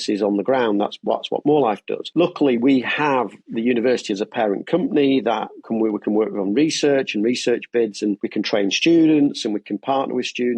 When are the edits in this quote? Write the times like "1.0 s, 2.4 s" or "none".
1.9 s, 8.2 s